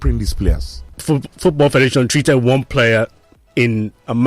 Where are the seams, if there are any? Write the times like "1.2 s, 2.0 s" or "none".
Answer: 1.0 s